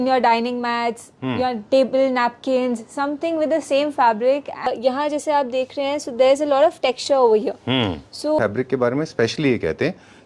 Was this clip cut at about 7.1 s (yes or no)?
no